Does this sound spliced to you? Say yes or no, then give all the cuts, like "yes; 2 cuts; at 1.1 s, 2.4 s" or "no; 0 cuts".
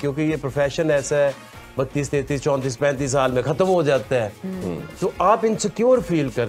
no; 0 cuts